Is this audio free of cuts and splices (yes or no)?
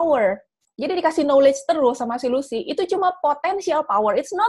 yes